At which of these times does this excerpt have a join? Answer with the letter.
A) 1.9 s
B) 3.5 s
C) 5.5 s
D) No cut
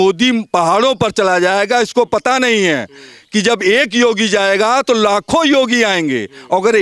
D